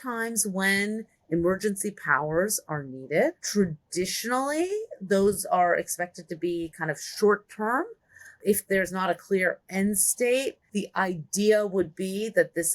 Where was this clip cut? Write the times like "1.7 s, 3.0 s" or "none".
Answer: 3.4 s, 8.4 s, 10.6 s